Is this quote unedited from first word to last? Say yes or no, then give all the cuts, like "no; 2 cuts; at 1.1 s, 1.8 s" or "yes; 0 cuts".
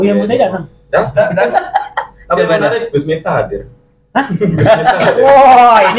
yes; 0 cuts